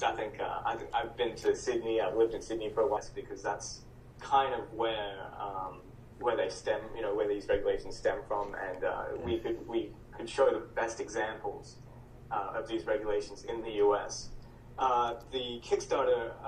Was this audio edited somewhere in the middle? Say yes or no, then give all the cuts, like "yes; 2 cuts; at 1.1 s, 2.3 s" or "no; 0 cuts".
no; 0 cuts